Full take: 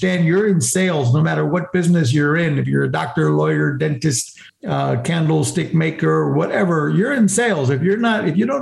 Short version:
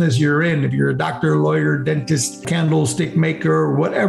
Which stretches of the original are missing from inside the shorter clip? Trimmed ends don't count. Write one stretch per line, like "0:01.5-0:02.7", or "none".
0:04.4-0:05.0